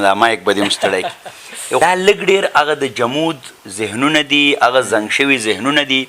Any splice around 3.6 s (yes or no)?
no